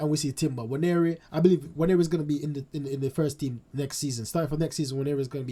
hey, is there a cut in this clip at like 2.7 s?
no; 0 cuts

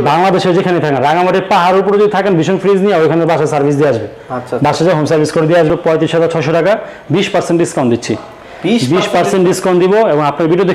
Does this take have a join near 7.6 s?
no; 1 cut; at 5.7 s

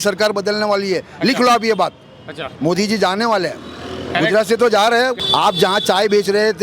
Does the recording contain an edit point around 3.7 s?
no; 1 cut; at 5.2 s

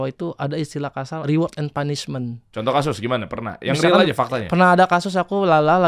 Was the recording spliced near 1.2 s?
yes; 2 cuts; at 1.2 s, 2.5 s

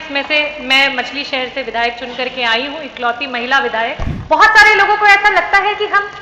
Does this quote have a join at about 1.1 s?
no; 1 cut; at 4.1 s

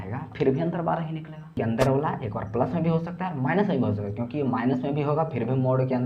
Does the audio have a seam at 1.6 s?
yes; 1 cut; at 1.6 s

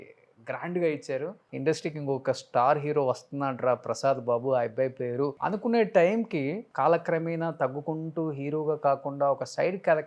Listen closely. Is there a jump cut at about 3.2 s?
no; 3 cuts; at 1.5 s, 5.4 s, 6.6 s

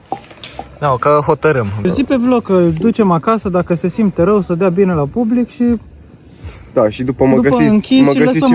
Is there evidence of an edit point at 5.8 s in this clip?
no; 1 cut; at 1.9 s

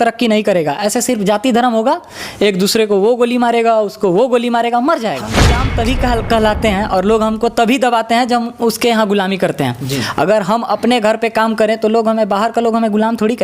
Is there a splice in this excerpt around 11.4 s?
no; 1 cut; at 5.7 s

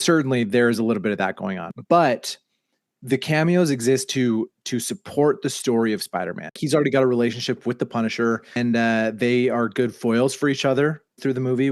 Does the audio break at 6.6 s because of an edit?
yes; 3 cuts; at 1.7 s, 6.6 s, 8.6 s

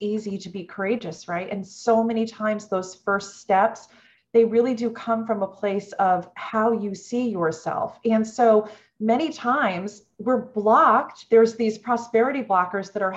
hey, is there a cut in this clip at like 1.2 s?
no; 0 cuts

